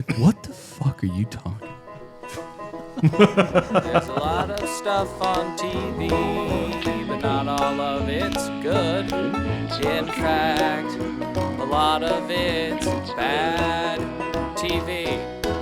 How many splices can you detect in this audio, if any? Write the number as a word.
one